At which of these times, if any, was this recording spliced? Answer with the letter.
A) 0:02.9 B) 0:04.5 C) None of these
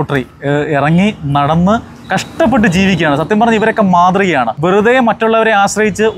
B